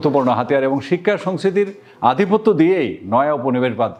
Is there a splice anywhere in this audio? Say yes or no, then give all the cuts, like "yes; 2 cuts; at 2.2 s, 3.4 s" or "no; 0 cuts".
no; 0 cuts